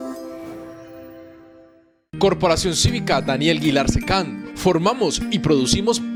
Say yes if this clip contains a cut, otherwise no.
no